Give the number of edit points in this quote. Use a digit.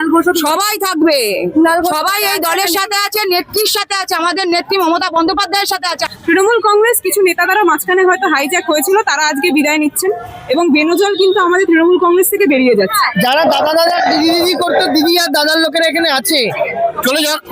3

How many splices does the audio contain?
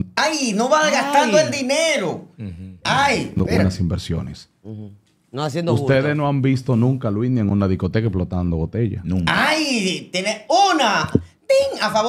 0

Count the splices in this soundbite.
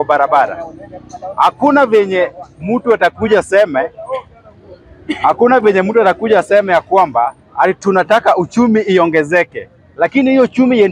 0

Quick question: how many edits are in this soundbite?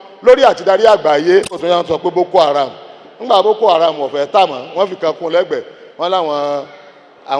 1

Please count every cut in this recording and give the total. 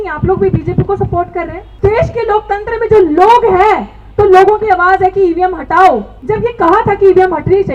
2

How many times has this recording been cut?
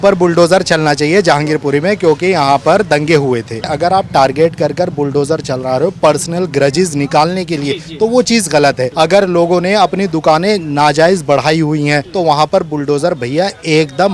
3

